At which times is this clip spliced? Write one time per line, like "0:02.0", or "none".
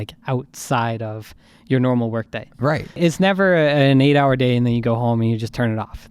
0:03.0